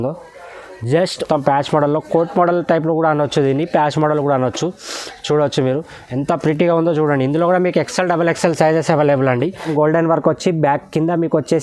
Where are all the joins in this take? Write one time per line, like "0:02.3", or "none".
0:01.2
0:09.7